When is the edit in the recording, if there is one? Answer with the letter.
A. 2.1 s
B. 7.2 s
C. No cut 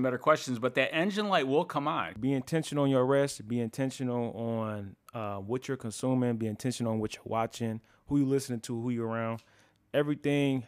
A